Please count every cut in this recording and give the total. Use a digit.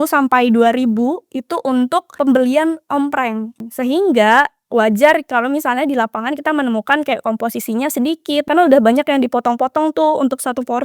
3